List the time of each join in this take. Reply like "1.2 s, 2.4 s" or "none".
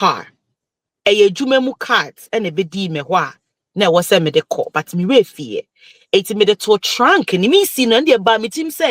none